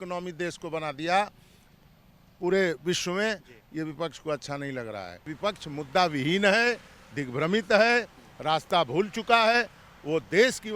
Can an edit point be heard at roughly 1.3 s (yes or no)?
no